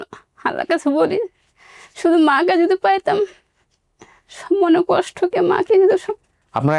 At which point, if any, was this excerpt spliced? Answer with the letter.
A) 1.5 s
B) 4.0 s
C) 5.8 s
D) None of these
D